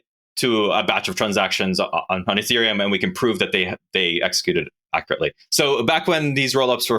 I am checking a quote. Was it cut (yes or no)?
yes